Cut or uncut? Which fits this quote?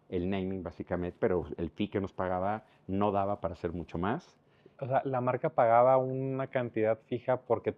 uncut